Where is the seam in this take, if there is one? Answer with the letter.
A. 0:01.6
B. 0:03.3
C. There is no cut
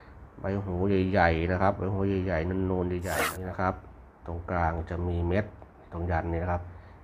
B